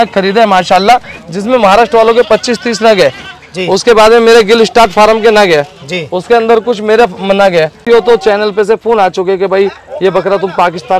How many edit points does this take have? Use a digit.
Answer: 1